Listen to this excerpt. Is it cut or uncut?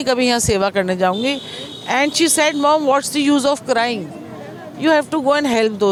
uncut